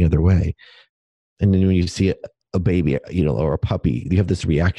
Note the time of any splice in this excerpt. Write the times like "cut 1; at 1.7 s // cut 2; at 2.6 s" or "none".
cut 1; at 0.9 s // cut 2; at 2.3 s